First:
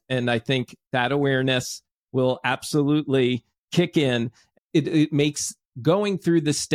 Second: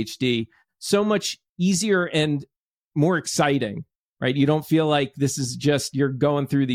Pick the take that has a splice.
first; 1 cut; at 4.4 s

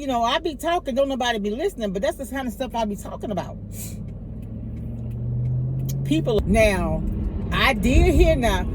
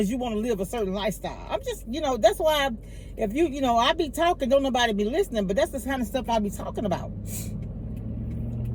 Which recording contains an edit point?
first; 1 cut; at 6.4 s

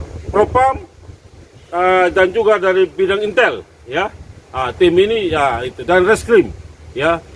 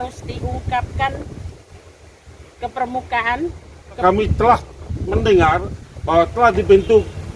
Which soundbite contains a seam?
second; 1 cut; at 4.0 s

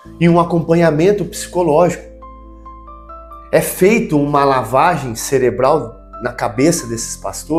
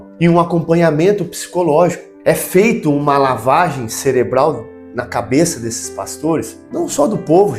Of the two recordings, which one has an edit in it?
second; 2 cuts; at 2.1 s, 6.6 s

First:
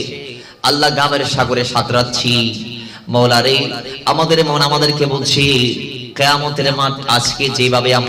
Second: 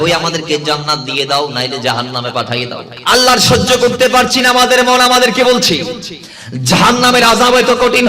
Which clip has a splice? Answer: second; 1 cut; at 2.9 s

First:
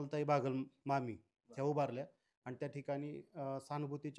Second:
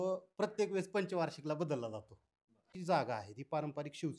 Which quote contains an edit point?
second; 1 cut; at 2.7 s

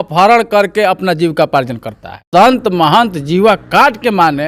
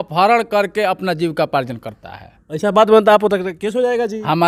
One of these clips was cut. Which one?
first; 1 cut; at 2.2 s

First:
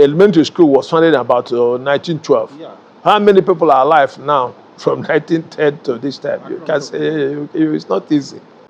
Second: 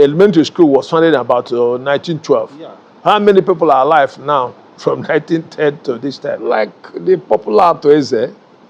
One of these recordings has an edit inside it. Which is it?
second; 1 cut; at 6.4 s

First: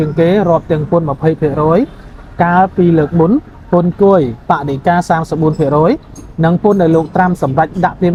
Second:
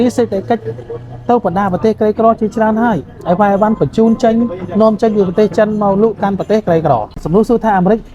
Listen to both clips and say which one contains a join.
second; 1 cut; at 7.2 s

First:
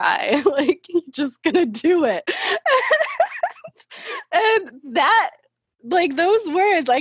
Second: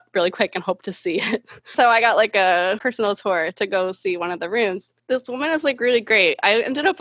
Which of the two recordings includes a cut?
second; 2 cuts; at 1.7 s, 4.9 s

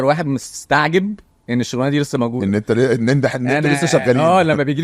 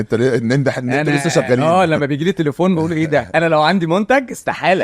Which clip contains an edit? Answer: second; 1 cut; at 3.3 s

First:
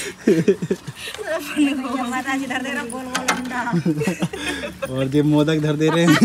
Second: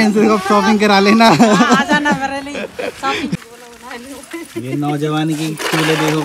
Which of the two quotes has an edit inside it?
second; 1 cut; at 3.4 s

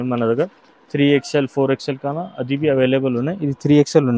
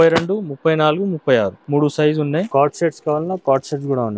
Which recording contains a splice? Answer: second; 2 cuts; at 1.6 s, 2.5 s

